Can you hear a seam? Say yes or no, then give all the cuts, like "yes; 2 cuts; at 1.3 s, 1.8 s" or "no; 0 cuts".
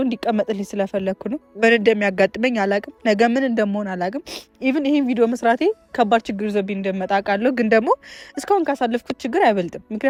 no; 0 cuts